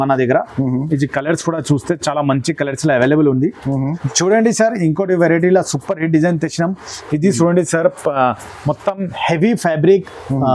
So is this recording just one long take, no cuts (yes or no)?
no